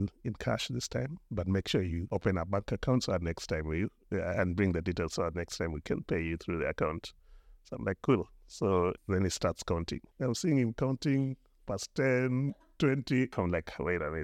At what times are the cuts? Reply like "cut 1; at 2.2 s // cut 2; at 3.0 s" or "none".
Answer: cut 1; at 2.0 s // cut 2; at 9.0 s // cut 3; at 10.0 s // cut 4; at 13.3 s